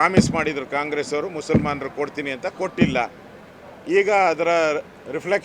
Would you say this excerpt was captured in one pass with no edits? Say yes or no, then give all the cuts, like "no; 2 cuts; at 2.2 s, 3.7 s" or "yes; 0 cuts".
yes; 0 cuts